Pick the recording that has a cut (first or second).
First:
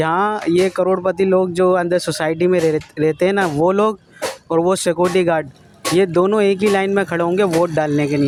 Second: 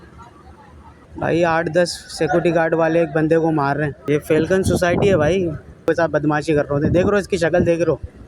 second